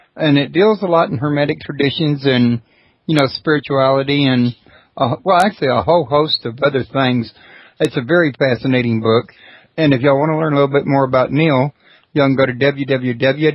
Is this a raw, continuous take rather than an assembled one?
yes; 0 cuts

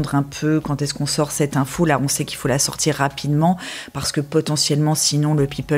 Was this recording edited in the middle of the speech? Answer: no; 0 cuts

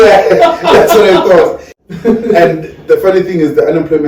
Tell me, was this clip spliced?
yes; 1 cut; at 1.7 s

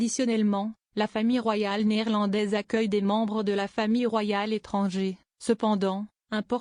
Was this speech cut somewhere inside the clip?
yes; 1 cut; at 5.0 s

